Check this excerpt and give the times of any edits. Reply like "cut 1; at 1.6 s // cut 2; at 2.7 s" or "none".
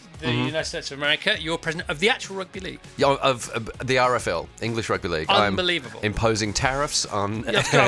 none

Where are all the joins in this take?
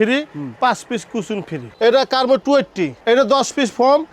cut 1; at 1.7 s // cut 2; at 3.0 s

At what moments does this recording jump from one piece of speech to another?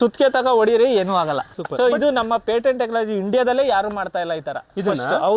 cut 1; at 1.6 s

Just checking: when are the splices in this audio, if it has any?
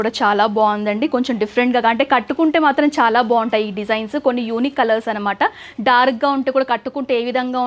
none

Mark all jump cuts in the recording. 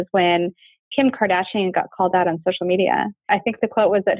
cut 1; at 3.3 s

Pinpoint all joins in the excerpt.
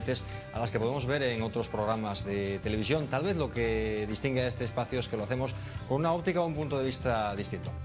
none

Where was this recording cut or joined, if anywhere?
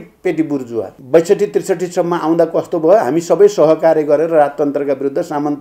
cut 1; at 1.0 s

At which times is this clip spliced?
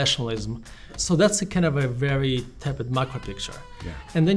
cut 1; at 1.0 s

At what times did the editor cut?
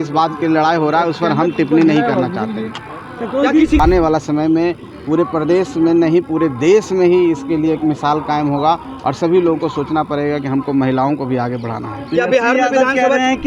cut 1; at 3.8 s

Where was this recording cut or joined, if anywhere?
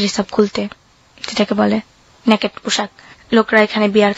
none

